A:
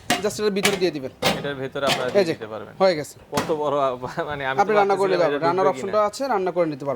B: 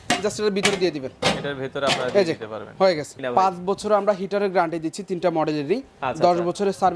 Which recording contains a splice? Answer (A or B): B